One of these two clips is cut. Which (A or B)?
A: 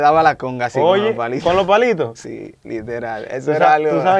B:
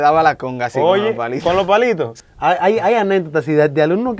B